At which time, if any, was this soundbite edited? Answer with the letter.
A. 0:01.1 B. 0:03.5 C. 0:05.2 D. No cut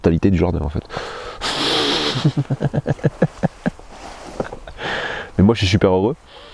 D